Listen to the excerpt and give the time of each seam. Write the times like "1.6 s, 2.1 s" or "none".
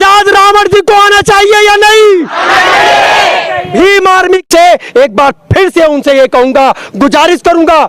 4.5 s